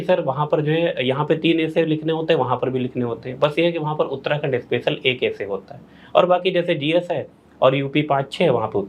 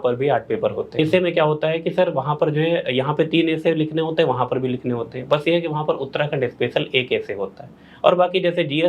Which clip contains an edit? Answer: second; 1 cut; at 0.9 s

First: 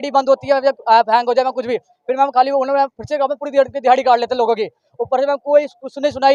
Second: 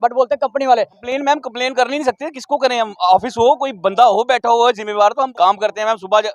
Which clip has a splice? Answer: second; 2 cuts; at 1.0 s, 5.3 s

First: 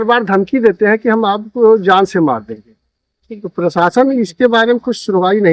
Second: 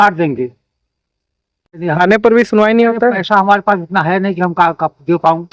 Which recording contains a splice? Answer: second; 1 cut; at 1.8 s

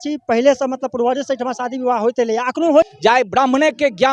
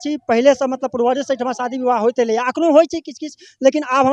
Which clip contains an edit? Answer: first; 1 cut; at 2.9 s

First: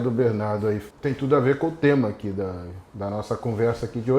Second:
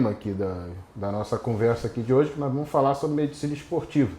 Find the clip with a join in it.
first; 1 cut; at 0.9 s

